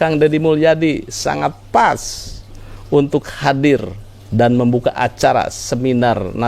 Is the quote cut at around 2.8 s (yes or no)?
no